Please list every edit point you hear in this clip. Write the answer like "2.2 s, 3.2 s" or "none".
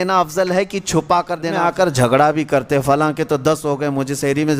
1.6 s